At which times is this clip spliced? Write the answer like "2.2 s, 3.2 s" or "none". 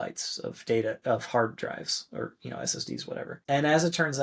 3.3 s

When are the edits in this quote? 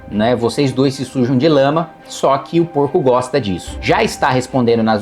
3.8 s

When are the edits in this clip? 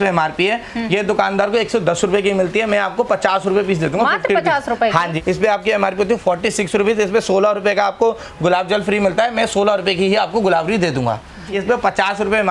5.1 s, 11.6 s

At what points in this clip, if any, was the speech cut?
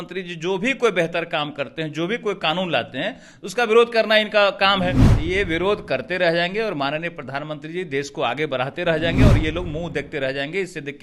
5.1 s

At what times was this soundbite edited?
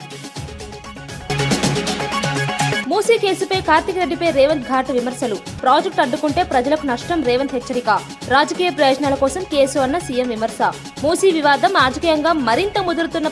none

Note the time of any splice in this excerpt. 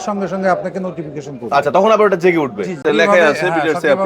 2.8 s

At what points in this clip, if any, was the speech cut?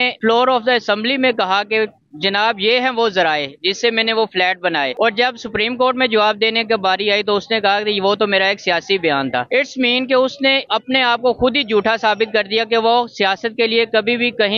none

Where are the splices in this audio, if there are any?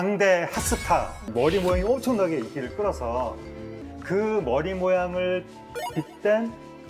1.2 s, 3.7 s

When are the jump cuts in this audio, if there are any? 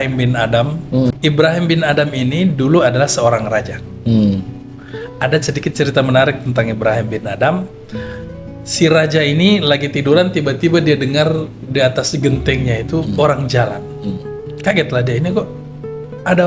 1.1 s

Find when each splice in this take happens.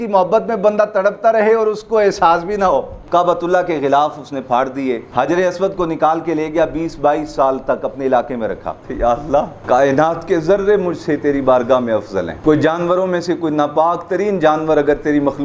3.0 s, 5.0 s, 8.9 s, 9.6 s, 12.3 s

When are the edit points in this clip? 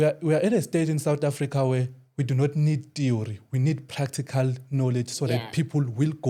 none

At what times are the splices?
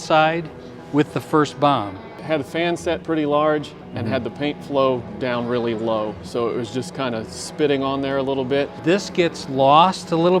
2.2 s, 8.7 s

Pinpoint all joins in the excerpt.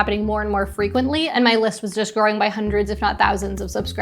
1.3 s

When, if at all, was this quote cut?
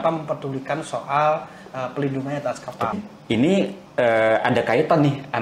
2.9 s

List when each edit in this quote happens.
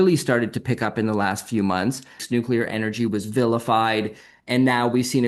2.2 s

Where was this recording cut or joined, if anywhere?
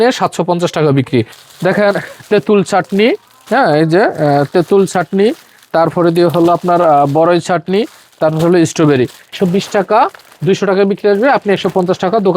1.4 s, 9.3 s

